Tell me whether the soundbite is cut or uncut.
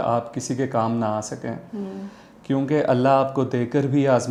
uncut